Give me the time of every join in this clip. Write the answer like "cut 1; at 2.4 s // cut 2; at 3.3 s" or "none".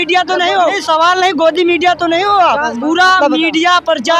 cut 1; at 0.7 s // cut 2; at 2.7 s